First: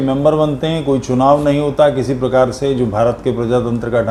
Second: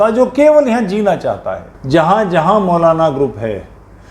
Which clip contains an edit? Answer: second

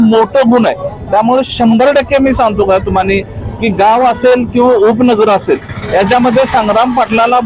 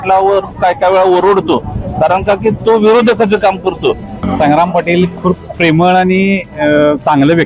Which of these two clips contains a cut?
second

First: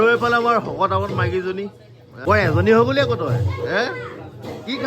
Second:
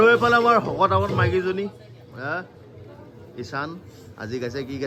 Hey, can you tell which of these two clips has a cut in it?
first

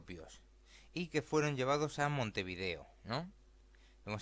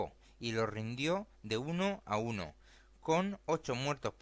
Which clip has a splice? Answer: second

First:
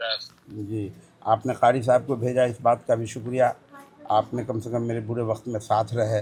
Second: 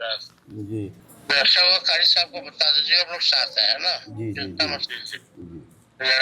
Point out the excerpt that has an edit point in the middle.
second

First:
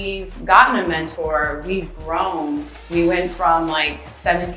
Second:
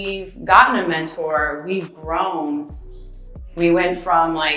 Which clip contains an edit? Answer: first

